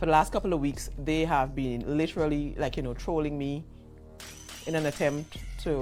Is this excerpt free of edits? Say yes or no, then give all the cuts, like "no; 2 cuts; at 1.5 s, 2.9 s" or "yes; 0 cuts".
yes; 0 cuts